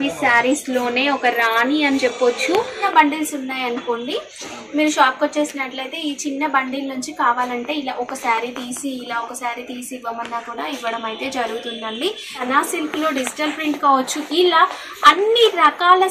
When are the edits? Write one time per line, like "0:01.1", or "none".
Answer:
0:02.7
0:12.4